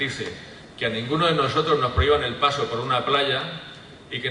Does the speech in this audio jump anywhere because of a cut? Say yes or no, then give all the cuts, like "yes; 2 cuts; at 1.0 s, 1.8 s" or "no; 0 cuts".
yes; 1 cut; at 3.2 s